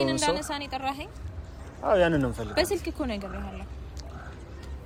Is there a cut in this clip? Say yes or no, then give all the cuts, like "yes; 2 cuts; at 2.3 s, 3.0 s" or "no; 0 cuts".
no; 0 cuts